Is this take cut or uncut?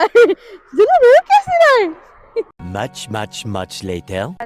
uncut